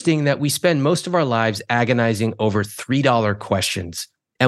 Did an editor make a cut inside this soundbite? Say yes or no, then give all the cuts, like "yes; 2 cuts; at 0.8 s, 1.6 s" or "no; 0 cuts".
no; 0 cuts